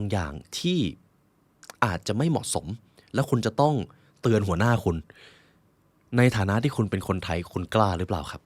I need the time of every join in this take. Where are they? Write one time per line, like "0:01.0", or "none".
none